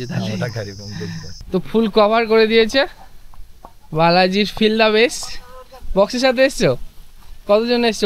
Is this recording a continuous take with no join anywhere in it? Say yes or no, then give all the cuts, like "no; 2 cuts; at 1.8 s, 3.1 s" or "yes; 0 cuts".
no; 1 cut; at 1.3 s